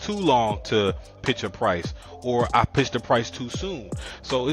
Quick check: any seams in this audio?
yes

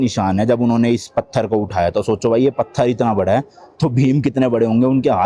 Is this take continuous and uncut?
yes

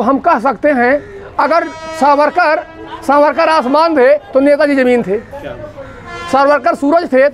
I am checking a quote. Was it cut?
no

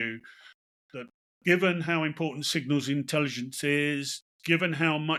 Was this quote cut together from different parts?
no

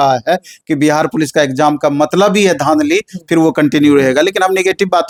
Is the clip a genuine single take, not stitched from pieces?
yes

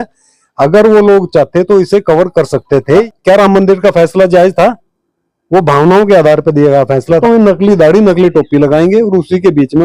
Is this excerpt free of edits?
no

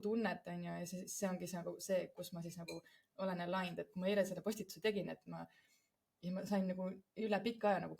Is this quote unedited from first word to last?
yes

